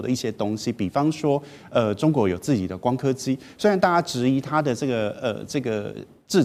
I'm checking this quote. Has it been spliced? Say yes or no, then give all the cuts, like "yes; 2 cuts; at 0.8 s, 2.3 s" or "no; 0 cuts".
no; 0 cuts